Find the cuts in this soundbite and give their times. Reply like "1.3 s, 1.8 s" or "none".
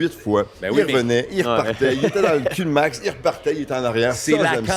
none